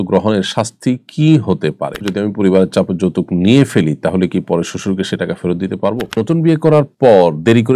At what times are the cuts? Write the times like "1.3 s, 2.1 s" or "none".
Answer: 2.1 s, 6.2 s